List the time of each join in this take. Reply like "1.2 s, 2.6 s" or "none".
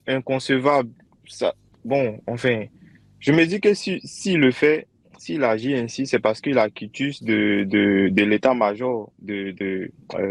none